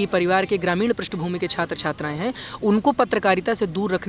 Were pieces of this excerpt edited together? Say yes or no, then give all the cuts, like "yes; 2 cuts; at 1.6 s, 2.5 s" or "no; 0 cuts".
no; 0 cuts